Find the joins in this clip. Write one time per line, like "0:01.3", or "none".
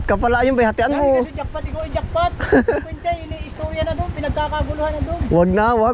none